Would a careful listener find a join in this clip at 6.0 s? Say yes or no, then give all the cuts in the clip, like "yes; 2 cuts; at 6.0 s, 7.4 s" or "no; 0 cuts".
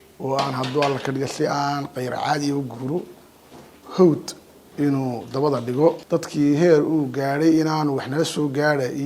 yes; 1 cut; at 6.0 s